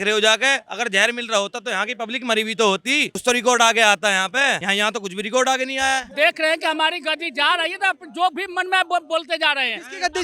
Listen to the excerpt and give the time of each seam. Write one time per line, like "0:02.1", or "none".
0:03.2
0:04.6
0:06.1